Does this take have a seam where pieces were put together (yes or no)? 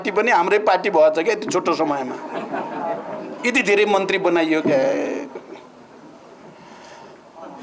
no